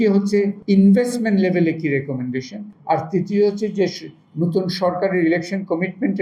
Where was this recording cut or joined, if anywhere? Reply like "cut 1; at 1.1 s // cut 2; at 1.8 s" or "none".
none